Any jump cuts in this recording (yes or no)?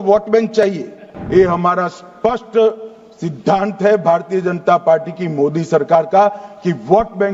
yes